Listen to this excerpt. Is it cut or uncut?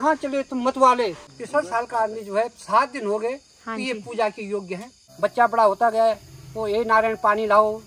cut